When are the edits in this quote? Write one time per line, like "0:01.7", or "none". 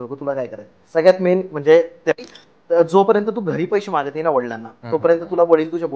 0:02.1